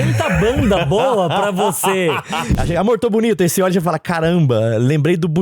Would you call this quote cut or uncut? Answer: cut